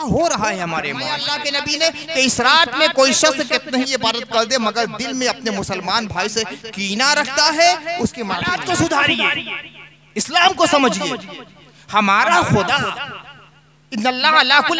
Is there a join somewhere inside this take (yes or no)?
yes